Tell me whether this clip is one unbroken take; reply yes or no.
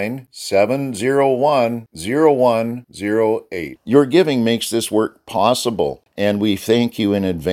no